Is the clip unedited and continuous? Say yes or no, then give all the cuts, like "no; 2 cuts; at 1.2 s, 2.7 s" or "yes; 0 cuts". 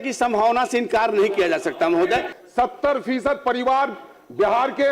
no; 1 cut; at 2.4 s